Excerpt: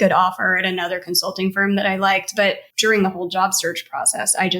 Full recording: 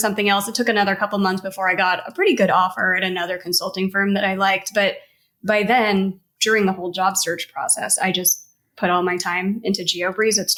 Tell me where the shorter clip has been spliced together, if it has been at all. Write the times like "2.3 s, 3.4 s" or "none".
2.7 s

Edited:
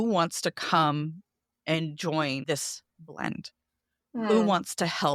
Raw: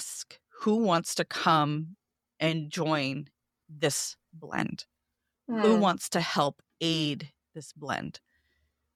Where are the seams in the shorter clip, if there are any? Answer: 2.4 s

